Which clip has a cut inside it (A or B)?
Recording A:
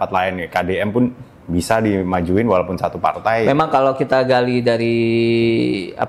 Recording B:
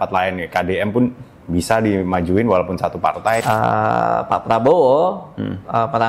B